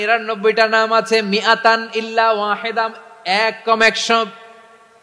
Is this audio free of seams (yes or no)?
yes